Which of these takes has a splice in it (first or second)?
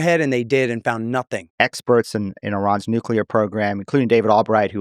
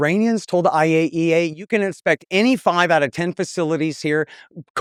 first